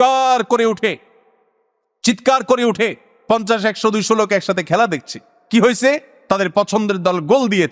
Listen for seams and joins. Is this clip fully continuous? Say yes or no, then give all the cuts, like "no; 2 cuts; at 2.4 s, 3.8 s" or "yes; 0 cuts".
yes; 0 cuts